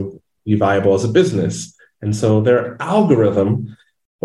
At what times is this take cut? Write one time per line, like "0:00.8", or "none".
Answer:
none